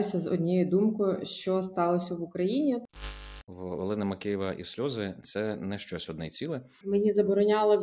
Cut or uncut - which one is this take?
cut